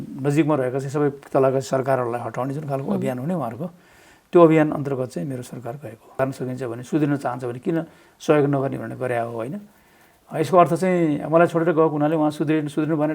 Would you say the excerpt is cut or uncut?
cut